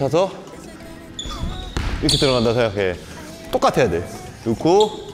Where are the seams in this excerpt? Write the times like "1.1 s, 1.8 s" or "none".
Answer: 1.9 s